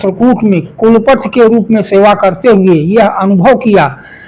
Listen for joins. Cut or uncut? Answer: uncut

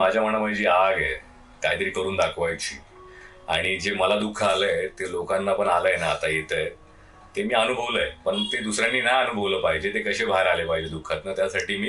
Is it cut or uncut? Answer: uncut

